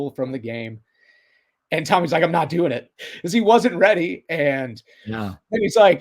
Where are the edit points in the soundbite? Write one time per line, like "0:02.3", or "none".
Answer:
0:02.9